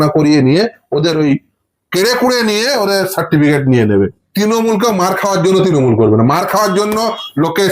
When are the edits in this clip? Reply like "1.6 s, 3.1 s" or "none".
4.2 s